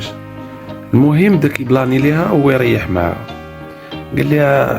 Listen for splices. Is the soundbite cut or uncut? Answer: uncut